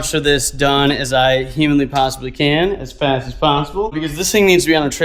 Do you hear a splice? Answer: no; 0 cuts

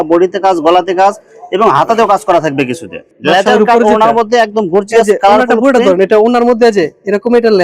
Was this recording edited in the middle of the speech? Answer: yes; 1 cut; at 3.1 s

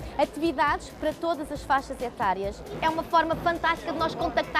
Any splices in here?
yes; 1 cut; at 2.7 s

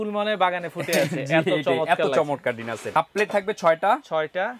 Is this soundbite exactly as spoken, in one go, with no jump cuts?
no; 1 cut; at 2.9 s

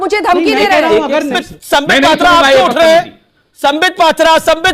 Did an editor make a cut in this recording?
yes; 1 cut; at 1.4 s

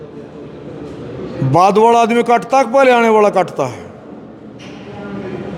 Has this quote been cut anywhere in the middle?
no; 0 cuts

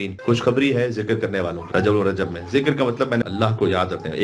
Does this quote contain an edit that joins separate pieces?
yes; 2 cuts; at 1.6 s, 3.2 s

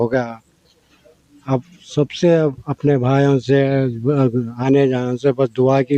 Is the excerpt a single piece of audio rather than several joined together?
yes; 0 cuts

